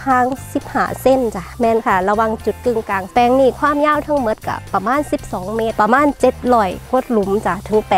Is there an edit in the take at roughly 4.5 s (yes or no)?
no